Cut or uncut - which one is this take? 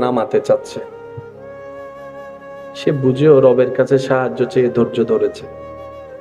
uncut